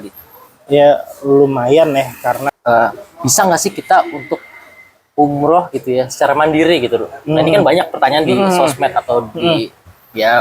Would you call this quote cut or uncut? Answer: cut